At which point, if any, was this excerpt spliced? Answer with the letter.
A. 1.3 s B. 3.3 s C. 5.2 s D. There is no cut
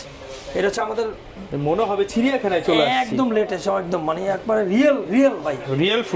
D